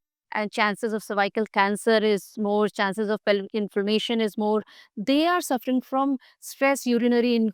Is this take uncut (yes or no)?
yes